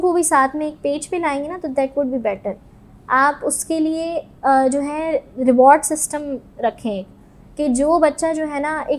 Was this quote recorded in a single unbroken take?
yes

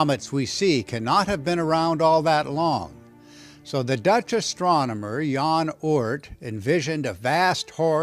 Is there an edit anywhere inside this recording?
yes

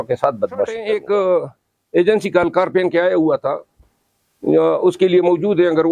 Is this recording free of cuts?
no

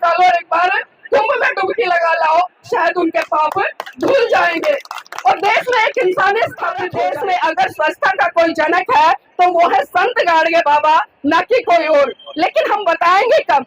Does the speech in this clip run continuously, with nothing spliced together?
no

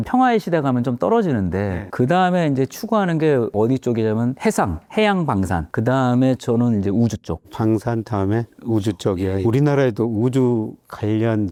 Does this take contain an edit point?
no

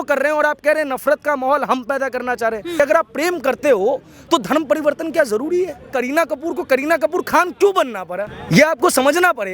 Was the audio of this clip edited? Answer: yes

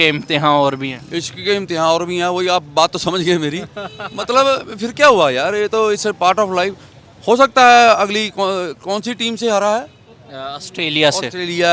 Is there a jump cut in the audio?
no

